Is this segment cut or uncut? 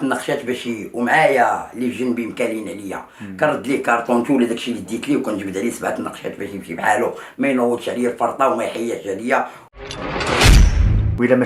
uncut